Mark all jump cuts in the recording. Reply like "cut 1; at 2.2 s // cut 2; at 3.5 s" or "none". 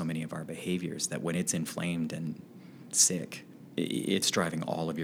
cut 1; at 3.4 s